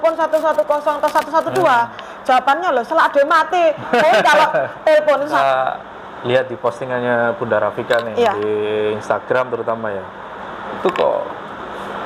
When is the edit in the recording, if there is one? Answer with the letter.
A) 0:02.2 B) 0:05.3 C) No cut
B